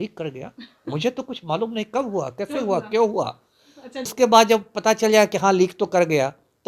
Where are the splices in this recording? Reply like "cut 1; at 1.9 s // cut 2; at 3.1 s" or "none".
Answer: cut 1; at 4.1 s

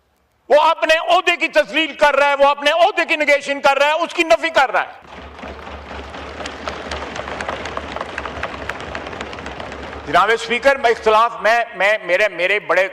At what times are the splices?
cut 1; at 5.0 s

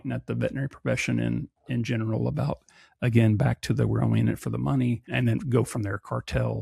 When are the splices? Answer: cut 1; at 5.1 s

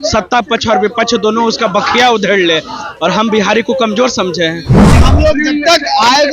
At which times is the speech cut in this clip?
cut 1; at 4.8 s

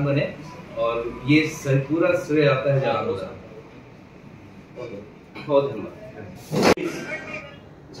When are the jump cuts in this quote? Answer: none

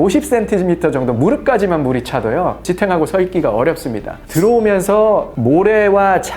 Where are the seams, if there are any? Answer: cut 1; at 4.2 s // cut 2; at 5.3 s

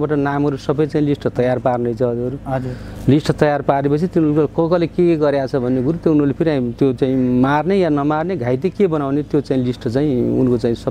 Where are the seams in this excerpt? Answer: none

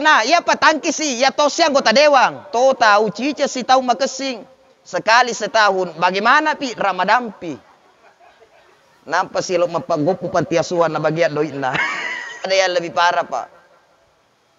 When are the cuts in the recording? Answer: cut 1; at 2.5 s // cut 2; at 12.5 s

